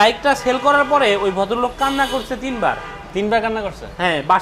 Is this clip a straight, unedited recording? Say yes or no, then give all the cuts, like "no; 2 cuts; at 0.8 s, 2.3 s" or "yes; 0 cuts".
yes; 0 cuts